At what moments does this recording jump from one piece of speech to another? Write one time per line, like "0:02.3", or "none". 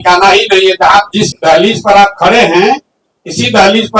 0:01.3

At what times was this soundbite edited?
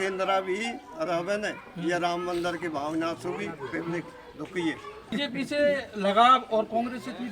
0:05.1

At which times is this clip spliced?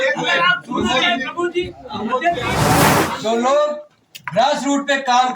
0:02.9

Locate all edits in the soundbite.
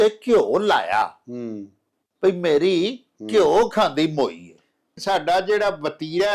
0:04.9

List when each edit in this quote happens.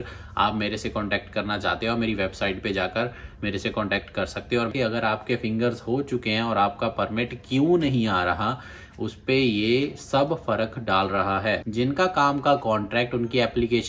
0:04.7
0:11.8

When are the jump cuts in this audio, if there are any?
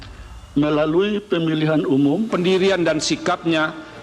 0:02.3

